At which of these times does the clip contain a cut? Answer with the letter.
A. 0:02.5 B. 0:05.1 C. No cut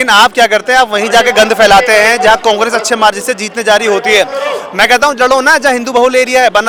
C